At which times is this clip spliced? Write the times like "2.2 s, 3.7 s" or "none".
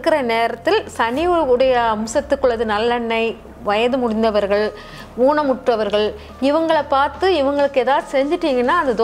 none